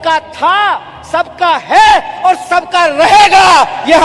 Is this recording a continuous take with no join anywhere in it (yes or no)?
yes